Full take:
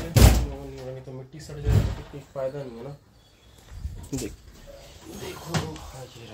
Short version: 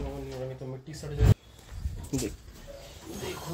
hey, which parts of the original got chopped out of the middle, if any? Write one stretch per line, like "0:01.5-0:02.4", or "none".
0:01.8-0:03.3